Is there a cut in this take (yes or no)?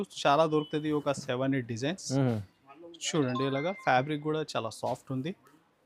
no